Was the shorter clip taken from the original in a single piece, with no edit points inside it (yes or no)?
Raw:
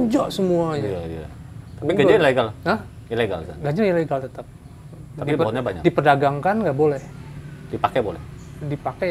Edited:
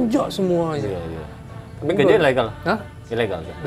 yes